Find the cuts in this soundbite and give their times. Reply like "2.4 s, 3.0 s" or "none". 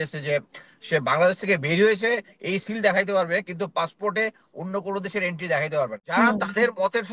6.0 s